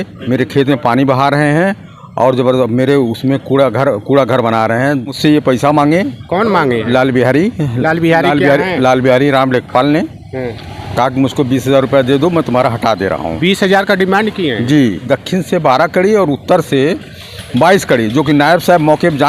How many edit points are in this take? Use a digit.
2